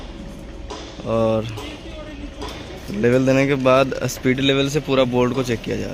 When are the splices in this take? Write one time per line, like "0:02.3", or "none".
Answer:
none